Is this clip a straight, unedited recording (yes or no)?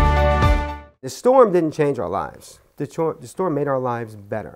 no